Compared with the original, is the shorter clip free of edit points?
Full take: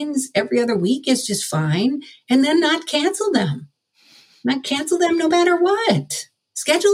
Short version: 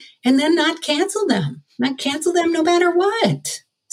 no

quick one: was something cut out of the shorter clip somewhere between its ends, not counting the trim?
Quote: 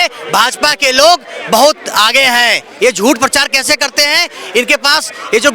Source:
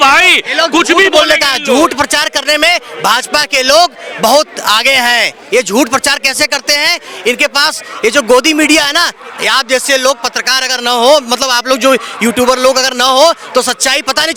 no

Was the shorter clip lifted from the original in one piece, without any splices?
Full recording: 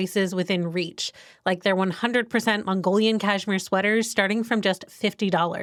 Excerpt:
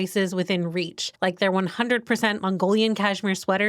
no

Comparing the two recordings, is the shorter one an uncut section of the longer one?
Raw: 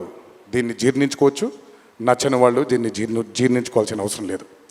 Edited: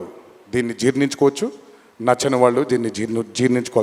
yes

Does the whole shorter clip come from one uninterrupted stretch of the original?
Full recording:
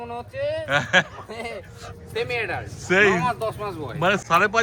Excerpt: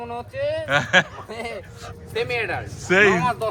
yes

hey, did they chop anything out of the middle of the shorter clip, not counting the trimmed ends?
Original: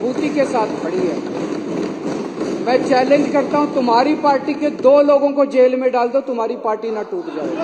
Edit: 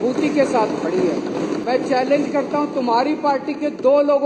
yes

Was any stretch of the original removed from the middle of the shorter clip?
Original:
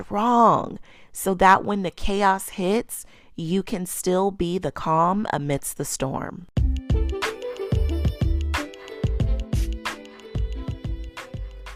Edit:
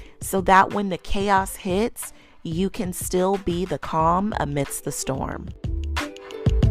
yes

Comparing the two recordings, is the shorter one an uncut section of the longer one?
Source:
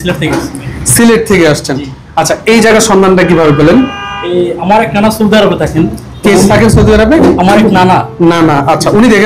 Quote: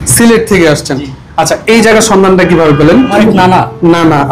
no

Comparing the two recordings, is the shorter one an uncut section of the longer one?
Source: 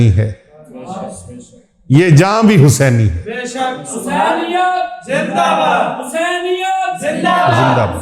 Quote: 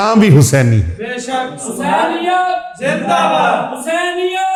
yes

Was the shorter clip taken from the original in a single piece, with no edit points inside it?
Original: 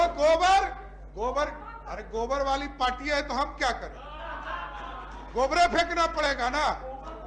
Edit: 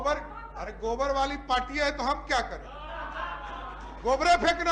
yes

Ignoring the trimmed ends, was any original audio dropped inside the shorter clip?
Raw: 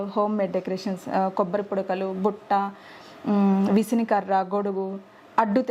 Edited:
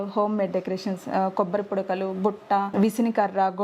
yes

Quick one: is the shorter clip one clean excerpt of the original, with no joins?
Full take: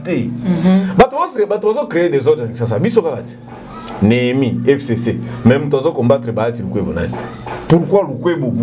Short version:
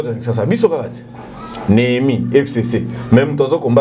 yes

